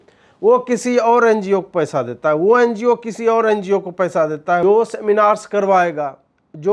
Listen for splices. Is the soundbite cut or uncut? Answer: cut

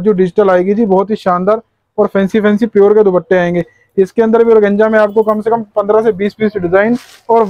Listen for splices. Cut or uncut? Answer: uncut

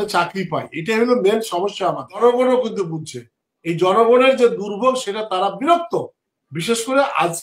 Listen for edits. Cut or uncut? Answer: cut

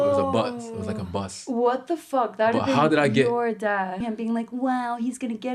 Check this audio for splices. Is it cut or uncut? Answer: cut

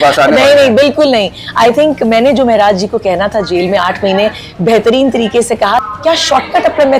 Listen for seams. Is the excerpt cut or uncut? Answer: cut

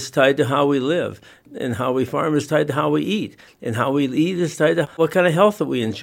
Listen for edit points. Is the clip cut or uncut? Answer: cut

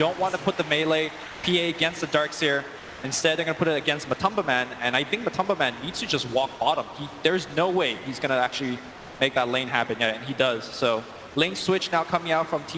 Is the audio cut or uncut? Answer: uncut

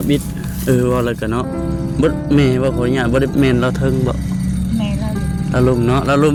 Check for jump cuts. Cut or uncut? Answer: uncut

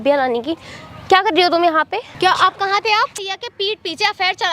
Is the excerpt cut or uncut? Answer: cut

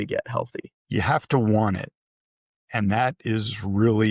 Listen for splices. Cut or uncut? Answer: uncut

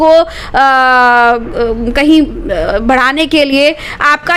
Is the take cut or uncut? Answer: uncut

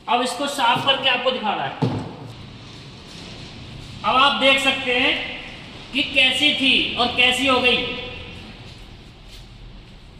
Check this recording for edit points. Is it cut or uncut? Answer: cut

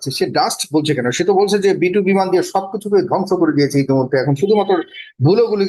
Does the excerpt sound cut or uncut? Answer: uncut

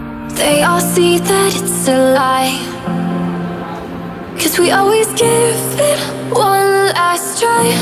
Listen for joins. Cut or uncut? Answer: uncut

